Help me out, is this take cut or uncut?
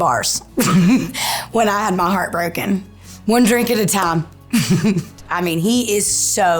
cut